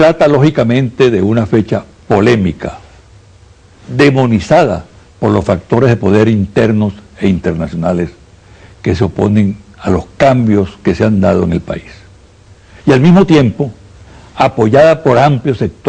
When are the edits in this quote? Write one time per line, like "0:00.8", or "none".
0:07.5